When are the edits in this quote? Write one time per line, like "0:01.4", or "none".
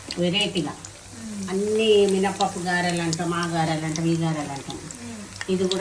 none